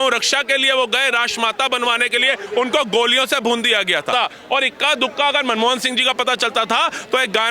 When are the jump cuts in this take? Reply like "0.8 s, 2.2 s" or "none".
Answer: 4.1 s